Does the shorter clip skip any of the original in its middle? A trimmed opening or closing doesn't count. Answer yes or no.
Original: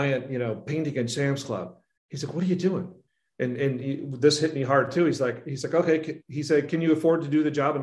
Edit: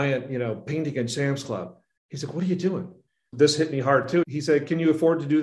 yes